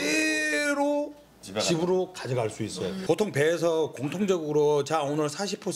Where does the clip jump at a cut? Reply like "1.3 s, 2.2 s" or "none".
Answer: 3.0 s

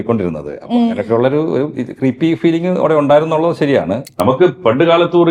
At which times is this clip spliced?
4.0 s

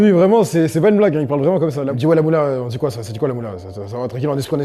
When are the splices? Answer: 1.9 s

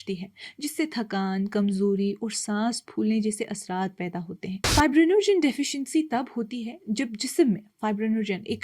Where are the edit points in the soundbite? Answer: 4.7 s

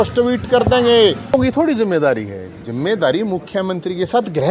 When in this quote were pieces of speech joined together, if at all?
1.3 s

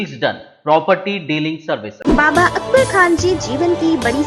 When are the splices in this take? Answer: 1.9 s

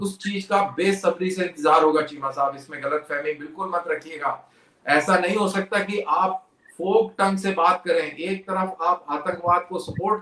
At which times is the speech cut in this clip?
none

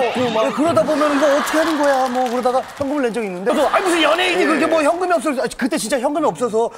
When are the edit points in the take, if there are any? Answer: 3.5 s

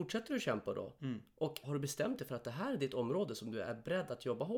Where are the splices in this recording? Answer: 1.6 s

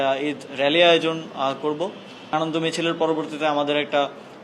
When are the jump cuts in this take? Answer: 2.3 s

